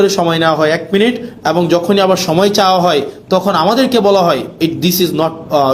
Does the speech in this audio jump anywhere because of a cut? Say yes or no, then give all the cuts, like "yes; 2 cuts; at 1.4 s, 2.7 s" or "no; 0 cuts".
no; 0 cuts